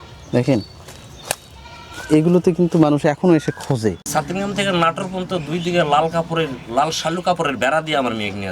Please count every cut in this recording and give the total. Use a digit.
1